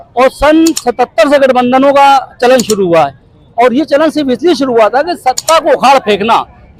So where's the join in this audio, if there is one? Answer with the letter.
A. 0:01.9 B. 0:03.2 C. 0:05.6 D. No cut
D